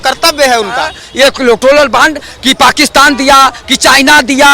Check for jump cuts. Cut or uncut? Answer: cut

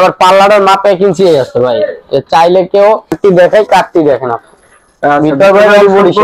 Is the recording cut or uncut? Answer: cut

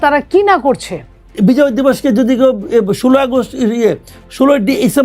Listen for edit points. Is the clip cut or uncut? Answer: cut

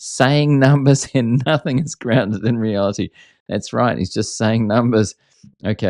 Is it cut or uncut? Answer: uncut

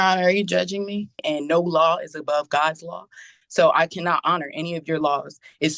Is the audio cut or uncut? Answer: cut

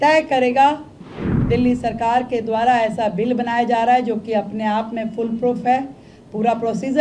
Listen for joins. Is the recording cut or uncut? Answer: cut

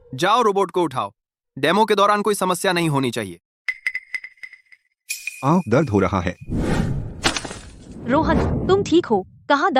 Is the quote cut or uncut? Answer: uncut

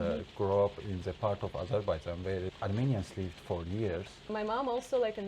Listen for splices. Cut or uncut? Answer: cut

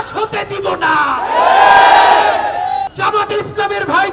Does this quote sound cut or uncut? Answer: cut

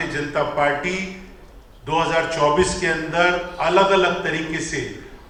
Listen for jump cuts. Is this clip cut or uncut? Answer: uncut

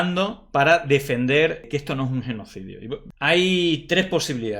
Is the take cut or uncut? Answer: cut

